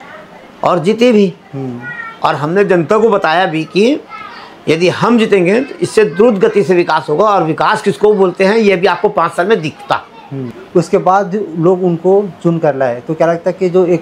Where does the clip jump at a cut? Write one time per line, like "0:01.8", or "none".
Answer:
0:10.5